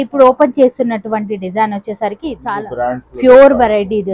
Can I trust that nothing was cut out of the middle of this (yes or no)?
no